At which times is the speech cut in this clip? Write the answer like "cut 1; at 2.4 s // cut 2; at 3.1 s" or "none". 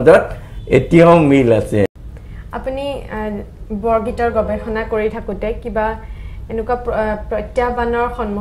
cut 1; at 1.9 s